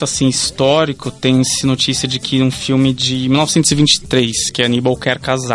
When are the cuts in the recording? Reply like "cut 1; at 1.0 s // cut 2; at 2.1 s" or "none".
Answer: none